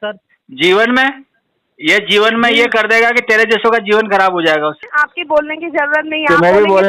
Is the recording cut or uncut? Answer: cut